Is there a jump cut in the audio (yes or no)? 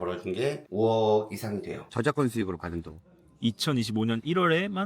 yes